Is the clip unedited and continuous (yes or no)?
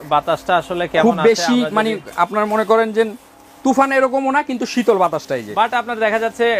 yes